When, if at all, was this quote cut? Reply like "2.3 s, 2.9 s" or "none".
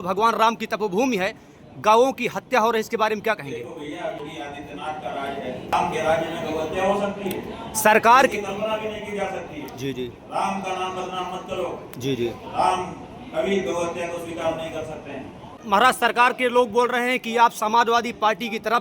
4.2 s, 5.7 s, 15.6 s